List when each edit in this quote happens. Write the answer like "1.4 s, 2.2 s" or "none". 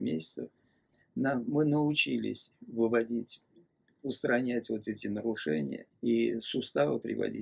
5.9 s